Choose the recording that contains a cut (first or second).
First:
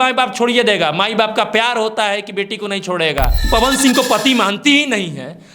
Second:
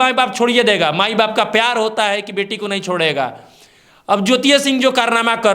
first